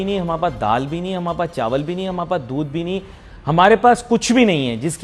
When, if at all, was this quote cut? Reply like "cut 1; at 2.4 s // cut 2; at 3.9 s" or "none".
none